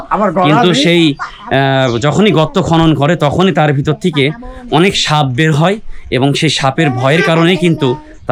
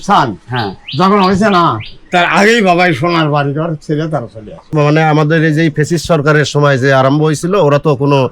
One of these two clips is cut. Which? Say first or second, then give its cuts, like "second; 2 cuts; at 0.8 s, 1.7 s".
second; 1 cut; at 4.7 s